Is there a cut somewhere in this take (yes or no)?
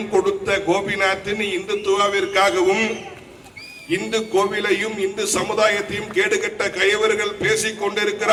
no